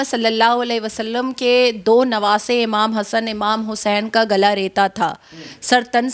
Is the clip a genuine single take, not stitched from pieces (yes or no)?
yes